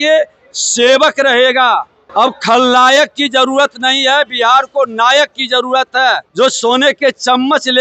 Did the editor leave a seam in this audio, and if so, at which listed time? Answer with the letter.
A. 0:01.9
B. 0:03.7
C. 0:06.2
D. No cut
C